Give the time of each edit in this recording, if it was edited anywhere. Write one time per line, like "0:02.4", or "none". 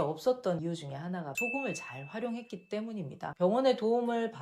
0:03.3